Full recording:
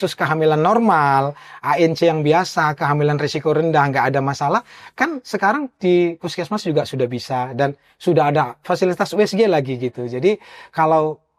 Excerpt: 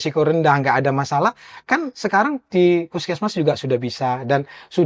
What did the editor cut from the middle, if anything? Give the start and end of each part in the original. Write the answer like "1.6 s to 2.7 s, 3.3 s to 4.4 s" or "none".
none